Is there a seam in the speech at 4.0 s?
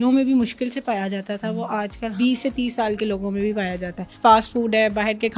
yes; 2 cuts; at 2.1 s, 4.0 s

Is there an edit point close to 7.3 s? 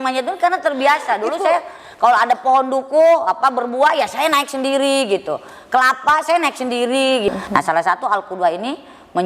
yes; 1 cut; at 7.3 s

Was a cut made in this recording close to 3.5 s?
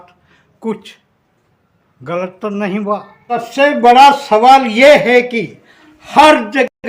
yes; 1 cut; at 3.5 s

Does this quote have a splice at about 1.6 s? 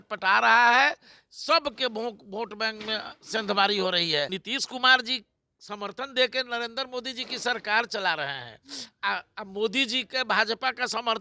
no; 1 cut; at 4.4 s

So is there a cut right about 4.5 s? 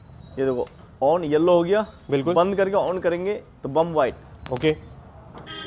no; 0 cuts

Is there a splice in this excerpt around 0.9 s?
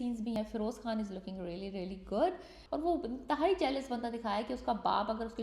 no; 1 cut; at 2.5 s

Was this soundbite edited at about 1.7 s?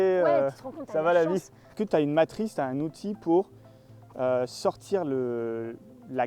yes; 1 cut; at 1.7 s

